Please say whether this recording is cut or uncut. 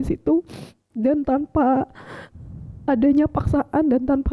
uncut